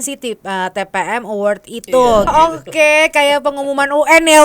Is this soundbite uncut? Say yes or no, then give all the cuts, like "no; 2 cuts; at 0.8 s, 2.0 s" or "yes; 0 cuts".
no; 1 cut; at 2.3 s